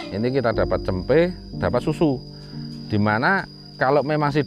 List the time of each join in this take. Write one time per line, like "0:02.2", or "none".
0:01.5
0:03.6